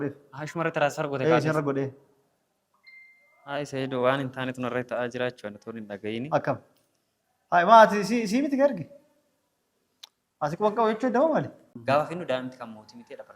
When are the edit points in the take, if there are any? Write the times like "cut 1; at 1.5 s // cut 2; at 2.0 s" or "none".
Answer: cut 1; at 11.6 s